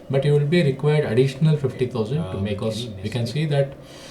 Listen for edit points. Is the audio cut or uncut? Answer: cut